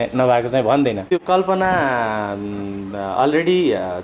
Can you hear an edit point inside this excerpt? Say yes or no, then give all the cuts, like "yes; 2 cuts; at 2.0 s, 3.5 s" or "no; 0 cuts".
yes; 1 cut; at 1.1 s